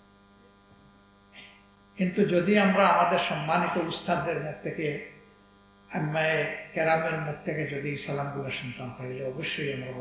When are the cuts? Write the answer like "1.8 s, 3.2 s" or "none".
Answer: none

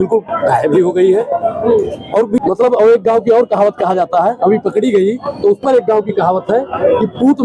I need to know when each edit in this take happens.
2.4 s

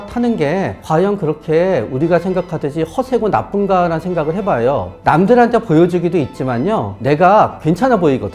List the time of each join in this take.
none

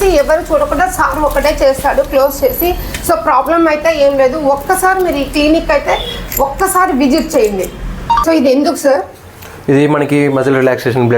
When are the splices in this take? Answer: 8.2 s

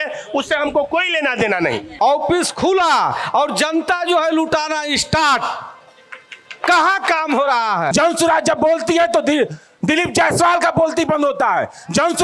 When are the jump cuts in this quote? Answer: 1.9 s, 7.9 s

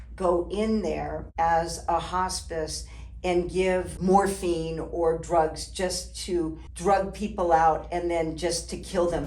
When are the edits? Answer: 1.2 s, 3.9 s, 6.7 s

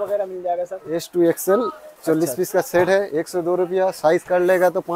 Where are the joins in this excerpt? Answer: none

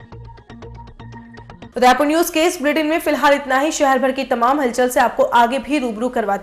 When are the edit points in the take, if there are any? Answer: none

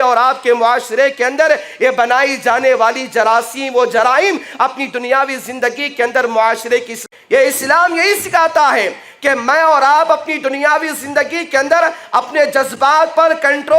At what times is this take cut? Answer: 7.0 s

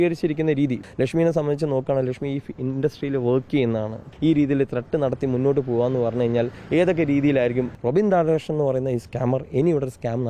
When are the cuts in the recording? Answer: 0.8 s, 4.1 s, 7.7 s

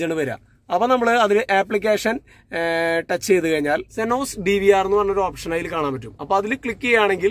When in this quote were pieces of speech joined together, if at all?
3.9 s

